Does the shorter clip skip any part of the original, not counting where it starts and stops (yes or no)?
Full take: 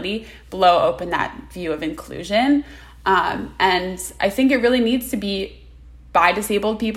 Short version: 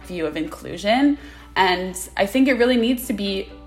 yes